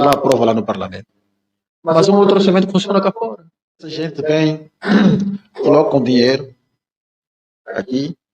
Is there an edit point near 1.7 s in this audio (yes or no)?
no